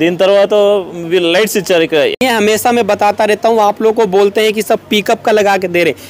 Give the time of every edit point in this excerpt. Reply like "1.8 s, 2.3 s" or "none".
2.2 s